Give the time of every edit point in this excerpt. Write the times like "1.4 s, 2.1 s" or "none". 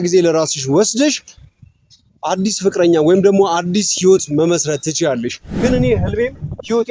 5.4 s